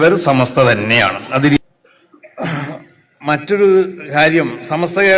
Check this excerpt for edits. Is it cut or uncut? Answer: cut